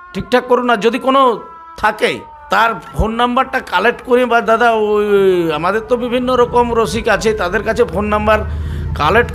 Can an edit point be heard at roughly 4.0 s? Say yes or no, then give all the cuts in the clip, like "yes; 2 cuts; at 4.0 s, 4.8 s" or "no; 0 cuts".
no; 1 cut; at 2.3 s